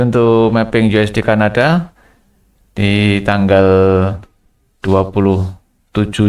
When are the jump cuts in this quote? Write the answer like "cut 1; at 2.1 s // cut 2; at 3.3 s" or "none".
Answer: none

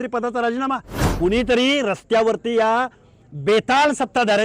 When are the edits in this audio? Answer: cut 1; at 1.0 s

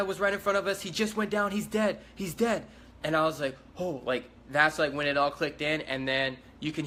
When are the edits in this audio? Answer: none

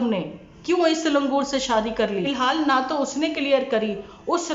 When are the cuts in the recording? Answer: cut 1; at 2.3 s

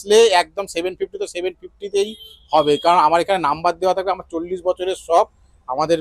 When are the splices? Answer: none

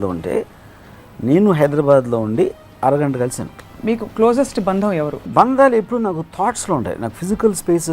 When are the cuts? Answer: cut 1; at 3.7 s // cut 2; at 5.2 s

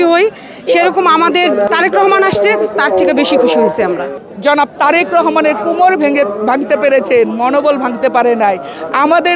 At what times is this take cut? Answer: cut 1; at 1.7 s // cut 2; at 4.1 s

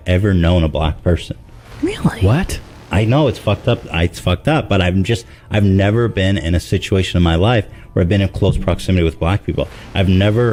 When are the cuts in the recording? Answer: none

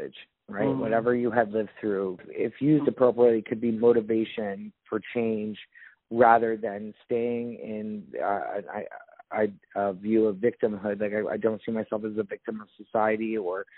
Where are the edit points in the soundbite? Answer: cut 1; at 2.2 s

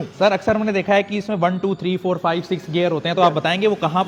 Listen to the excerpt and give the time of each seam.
none

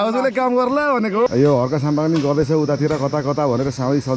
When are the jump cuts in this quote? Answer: cut 1; at 1.3 s

